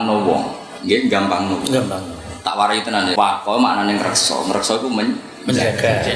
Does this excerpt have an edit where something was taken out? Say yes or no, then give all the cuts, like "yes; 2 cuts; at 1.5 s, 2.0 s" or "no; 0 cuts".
yes; 1 cut; at 3.1 s